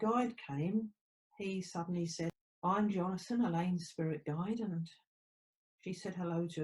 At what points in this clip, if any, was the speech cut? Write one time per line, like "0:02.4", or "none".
0:02.3